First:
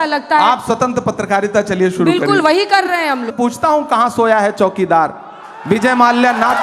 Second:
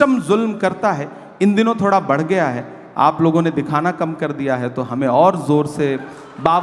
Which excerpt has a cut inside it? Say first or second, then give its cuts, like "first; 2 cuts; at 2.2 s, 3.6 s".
first; 1 cut; at 3.3 s